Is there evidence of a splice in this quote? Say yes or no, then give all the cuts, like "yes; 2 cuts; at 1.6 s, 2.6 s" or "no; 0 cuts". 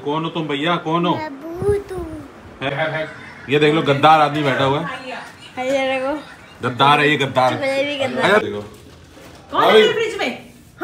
yes; 2 cuts; at 2.7 s, 8.4 s